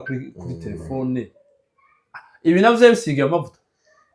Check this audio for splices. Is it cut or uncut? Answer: uncut